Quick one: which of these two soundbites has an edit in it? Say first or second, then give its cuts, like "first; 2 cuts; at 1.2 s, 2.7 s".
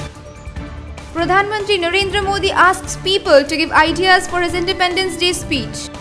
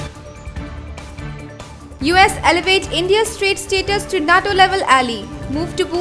second; 1 cut; at 1.1 s